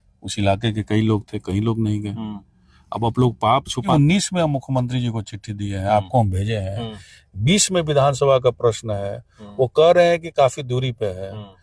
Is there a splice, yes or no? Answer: yes